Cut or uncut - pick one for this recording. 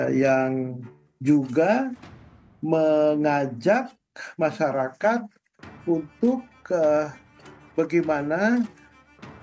uncut